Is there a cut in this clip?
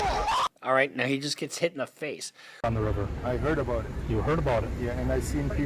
yes; 1 cut; at 2.6 s

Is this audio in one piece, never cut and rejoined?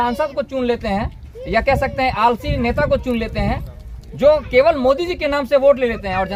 yes; 0 cuts

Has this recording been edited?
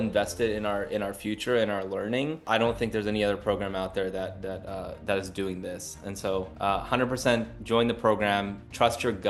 no; 0 cuts

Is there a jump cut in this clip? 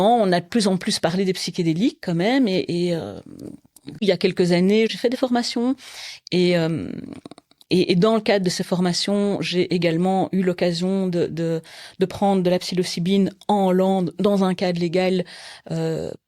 yes; 2 cuts; at 4.0 s, 4.9 s

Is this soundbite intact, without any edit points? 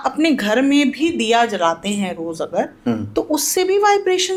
yes; 0 cuts

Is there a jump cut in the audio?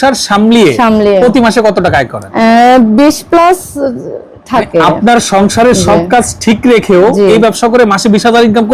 yes; 1 cut; at 2.2 s

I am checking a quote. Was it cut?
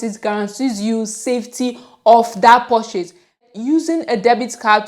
yes; 1 cut; at 3.4 s

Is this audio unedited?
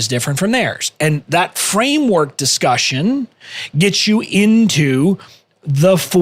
yes; 0 cuts

